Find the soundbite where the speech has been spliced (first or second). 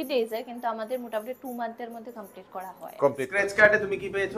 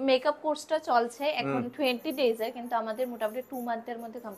first